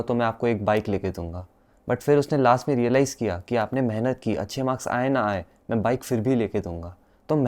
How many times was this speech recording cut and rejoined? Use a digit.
0